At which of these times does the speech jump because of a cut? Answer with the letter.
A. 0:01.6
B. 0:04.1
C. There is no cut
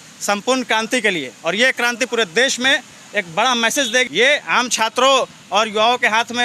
B